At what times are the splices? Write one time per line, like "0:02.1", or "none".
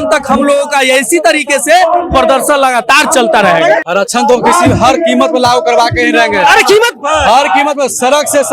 0:03.8